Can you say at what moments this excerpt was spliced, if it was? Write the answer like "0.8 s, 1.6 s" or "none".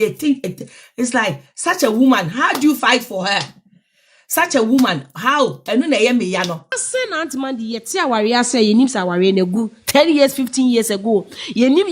6.8 s